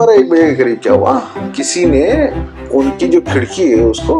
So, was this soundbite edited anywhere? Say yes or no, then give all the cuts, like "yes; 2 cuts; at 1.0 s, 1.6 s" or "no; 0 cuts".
yes; 1 cut; at 1.5 s